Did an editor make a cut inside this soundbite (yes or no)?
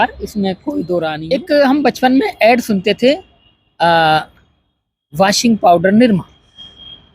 yes